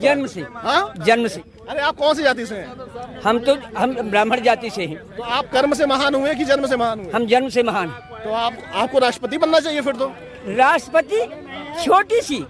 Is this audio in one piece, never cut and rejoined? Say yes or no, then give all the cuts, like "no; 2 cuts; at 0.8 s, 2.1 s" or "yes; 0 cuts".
no; 1 cut; at 1.4 s